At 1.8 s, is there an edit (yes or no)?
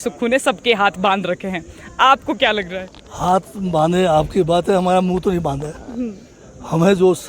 no